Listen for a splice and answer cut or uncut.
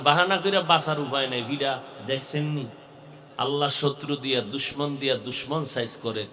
cut